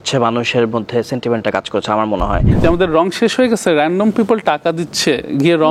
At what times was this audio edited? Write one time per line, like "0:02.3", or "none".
0:02.5